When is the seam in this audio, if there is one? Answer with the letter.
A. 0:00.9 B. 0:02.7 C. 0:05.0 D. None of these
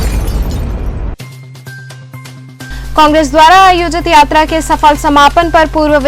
D